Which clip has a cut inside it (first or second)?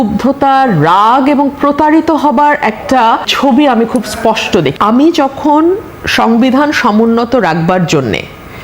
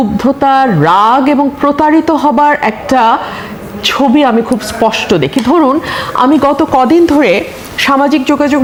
first